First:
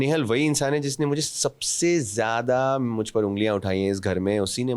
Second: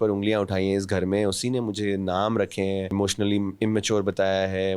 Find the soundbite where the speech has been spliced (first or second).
second